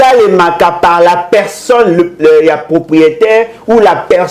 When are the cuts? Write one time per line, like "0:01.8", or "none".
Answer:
none